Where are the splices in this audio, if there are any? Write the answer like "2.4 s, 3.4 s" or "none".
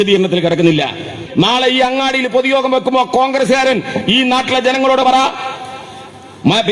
1.2 s